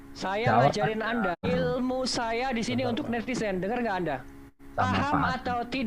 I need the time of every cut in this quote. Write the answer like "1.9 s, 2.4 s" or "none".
1.4 s, 4.6 s

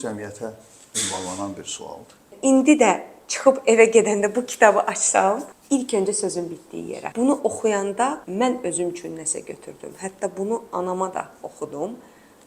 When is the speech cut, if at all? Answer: 2.3 s, 5.5 s, 7.0 s, 8.2 s

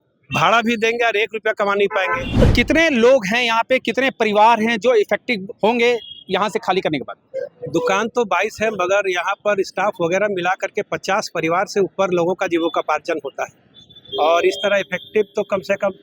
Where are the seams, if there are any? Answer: 2.3 s

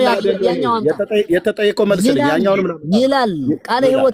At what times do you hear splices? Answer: none

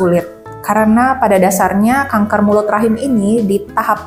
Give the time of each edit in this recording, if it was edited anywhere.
none

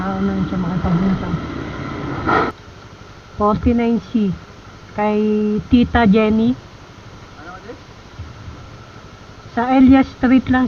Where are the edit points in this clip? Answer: 2.5 s

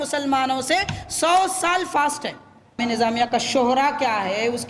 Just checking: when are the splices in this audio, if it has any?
2.8 s

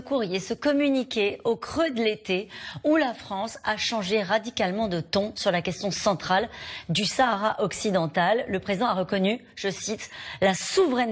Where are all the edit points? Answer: none

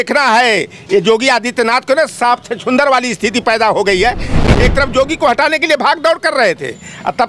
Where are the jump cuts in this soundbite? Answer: 4.4 s

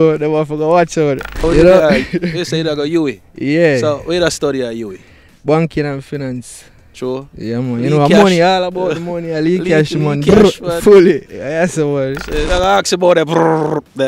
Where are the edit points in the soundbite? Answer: 1.4 s, 12.4 s

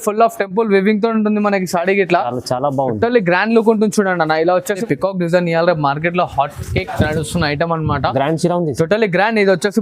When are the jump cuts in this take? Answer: 4.7 s

